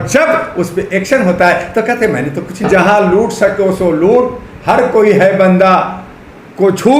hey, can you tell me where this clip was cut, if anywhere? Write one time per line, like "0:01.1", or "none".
0:02.6